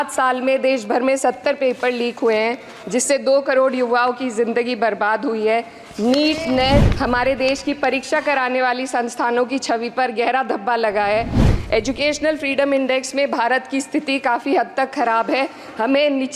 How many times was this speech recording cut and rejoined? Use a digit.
2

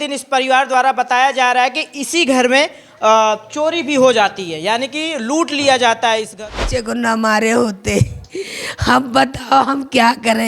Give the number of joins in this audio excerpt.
1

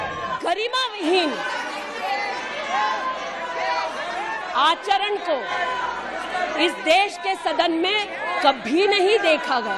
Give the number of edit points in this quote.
0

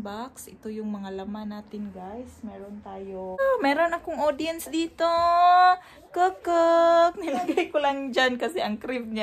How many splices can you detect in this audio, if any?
1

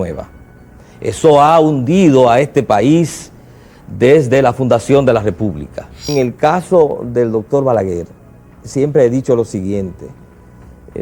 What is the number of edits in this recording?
1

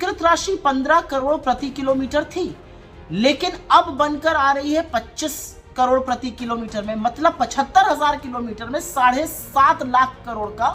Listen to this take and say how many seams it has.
0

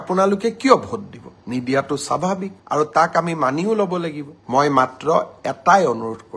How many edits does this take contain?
1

